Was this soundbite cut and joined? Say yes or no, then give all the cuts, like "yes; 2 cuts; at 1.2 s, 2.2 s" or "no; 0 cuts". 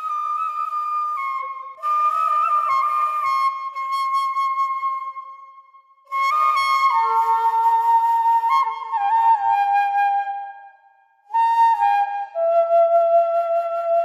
no; 0 cuts